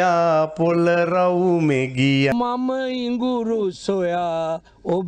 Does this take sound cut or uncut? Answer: cut